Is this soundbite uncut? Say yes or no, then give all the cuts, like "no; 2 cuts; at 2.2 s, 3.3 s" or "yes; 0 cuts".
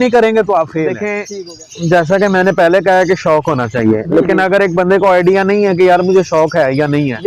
no; 1 cut; at 1.1 s